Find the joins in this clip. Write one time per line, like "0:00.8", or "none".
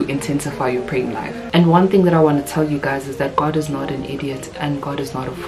0:01.4